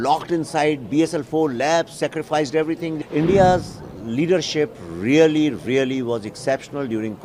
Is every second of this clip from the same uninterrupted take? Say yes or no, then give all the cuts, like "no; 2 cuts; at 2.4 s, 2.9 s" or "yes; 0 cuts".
no; 1 cut; at 3.0 s